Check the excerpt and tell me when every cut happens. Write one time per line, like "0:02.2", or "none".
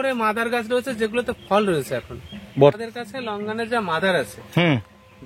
0:02.8